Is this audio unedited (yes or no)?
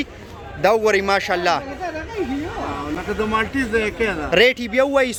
yes